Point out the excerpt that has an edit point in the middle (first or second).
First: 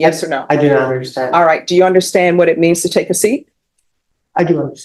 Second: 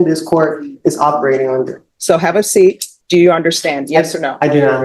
second